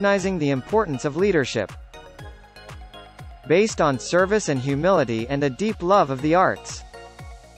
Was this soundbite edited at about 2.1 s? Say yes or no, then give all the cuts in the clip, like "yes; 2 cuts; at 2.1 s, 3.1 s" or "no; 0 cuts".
no; 1 cut; at 6.6 s